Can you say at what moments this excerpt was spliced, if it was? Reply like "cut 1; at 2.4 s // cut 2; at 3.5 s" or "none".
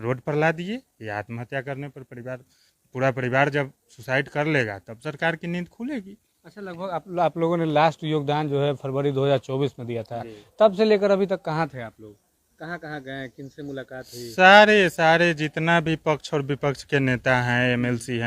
none